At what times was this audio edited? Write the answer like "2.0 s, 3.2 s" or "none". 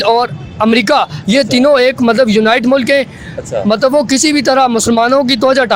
none